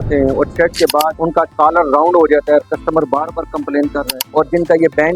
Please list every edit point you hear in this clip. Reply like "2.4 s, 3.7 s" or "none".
1.1 s, 4.1 s